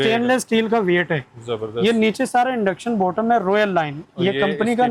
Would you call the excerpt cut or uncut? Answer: uncut